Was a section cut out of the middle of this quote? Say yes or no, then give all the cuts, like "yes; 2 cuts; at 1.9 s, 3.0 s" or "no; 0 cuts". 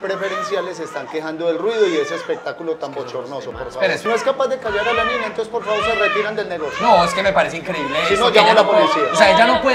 yes; 1 cut; at 4.0 s